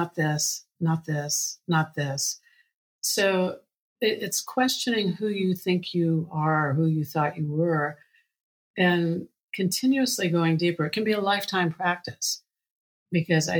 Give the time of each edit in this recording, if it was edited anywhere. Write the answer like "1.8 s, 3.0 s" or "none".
none